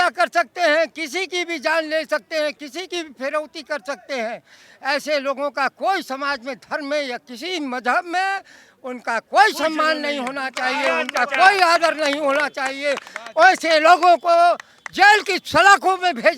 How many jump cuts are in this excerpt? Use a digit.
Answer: 0